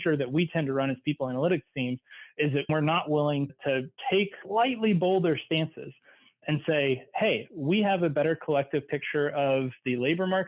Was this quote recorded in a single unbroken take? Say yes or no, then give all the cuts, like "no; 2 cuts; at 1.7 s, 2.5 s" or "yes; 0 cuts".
no; 1 cut; at 2.7 s